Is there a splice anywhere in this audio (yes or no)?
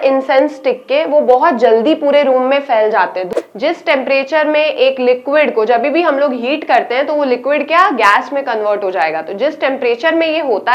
yes